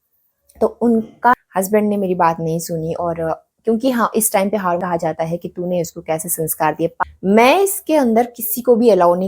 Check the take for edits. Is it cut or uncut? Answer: cut